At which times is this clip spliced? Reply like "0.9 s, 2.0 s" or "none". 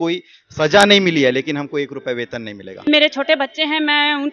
2.9 s